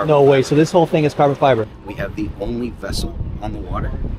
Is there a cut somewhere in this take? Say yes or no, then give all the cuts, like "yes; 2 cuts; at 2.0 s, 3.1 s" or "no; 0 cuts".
yes; 1 cut; at 1.8 s